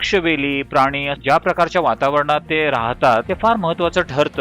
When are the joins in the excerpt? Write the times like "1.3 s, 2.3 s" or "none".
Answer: 1.1 s, 3.3 s